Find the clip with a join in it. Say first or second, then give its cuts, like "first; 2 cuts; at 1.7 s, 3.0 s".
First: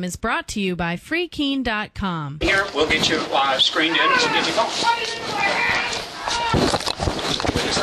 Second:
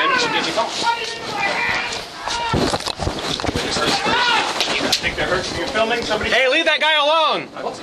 first; 1 cut; at 2.4 s